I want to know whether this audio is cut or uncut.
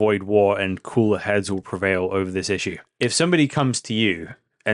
cut